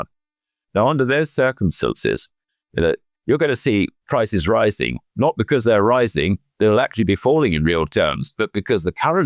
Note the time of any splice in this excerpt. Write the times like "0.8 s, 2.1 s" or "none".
none